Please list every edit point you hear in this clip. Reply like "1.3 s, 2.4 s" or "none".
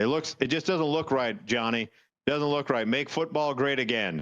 none